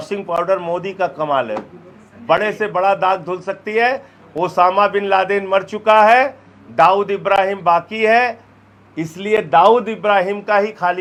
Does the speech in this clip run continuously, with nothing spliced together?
yes; 0 cuts

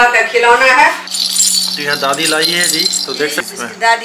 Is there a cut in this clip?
yes; 1 cut; at 1.1 s

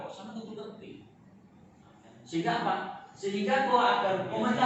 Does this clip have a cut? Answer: no; 0 cuts

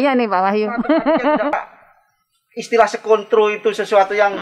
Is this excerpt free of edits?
no; 1 cut; at 1.5 s

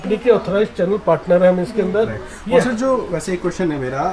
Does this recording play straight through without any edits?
yes; 0 cuts

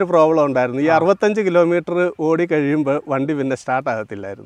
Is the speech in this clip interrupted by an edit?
no; 0 cuts

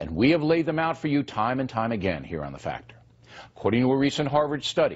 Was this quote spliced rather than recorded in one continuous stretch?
no; 0 cuts

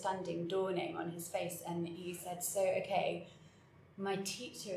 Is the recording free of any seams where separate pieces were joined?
yes; 0 cuts

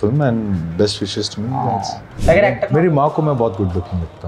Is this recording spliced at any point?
yes; 1 cut; at 2.1 s

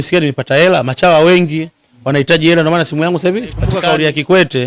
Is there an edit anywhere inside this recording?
yes; 1 cut; at 3.8 s

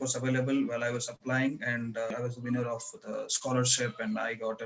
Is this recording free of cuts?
no; 1 cut; at 2.1 s

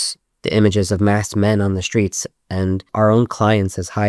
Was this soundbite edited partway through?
yes; 1 cut; at 2.9 s

